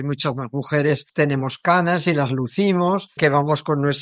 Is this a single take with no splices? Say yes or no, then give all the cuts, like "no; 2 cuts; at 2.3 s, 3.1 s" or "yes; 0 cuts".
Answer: no; 2 cuts; at 1.1 s, 3.1 s